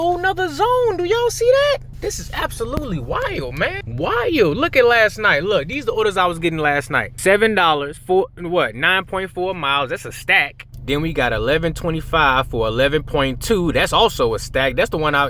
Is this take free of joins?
yes; 0 cuts

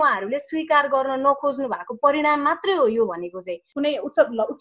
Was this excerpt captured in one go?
no; 1 cut; at 3.6 s

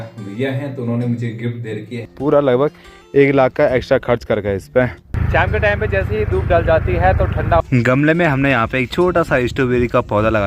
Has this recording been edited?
yes; 3 cuts; at 2.1 s, 5.0 s, 7.6 s

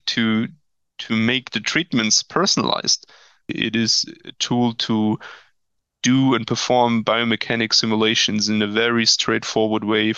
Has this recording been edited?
yes; 1 cut; at 3.5 s

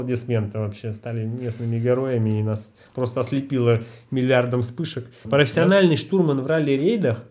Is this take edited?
yes; 1 cut; at 5.1 s

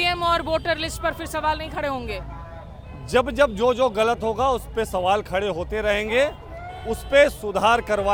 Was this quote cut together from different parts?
no; 0 cuts

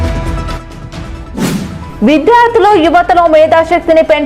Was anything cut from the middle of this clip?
yes; 1 cut; at 1.4 s

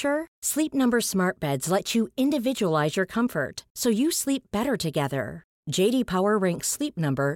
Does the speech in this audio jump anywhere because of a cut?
no; 0 cuts

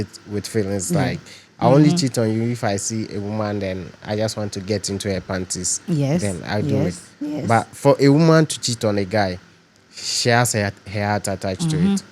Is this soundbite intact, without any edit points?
yes; 0 cuts

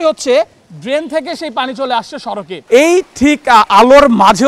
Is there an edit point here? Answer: yes; 1 cut; at 2.5 s

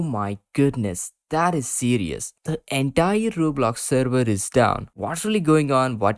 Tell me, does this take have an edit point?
yes; 2 cuts; at 2.4 s, 4.9 s

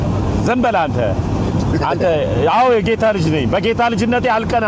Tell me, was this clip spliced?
no; 0 cuts

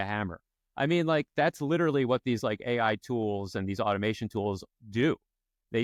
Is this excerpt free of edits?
yes; 0 cuts

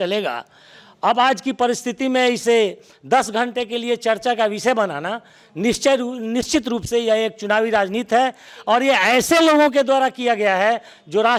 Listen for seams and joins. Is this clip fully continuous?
yes; 0 cuts

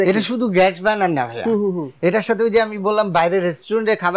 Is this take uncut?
yes; 0 cuts

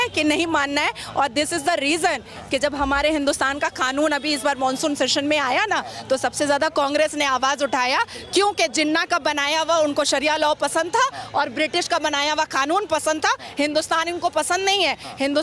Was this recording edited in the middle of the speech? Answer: no; 0 cuts

